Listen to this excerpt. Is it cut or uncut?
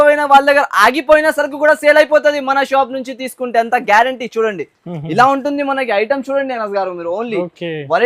uncut